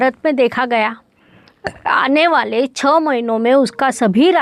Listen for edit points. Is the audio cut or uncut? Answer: uncut